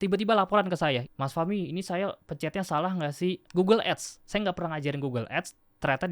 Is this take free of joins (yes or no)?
no